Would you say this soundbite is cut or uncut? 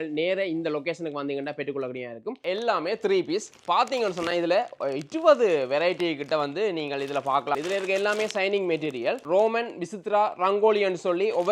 cut